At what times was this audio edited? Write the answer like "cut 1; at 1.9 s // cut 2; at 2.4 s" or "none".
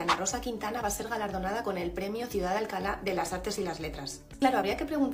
cut 1; at 4.2 s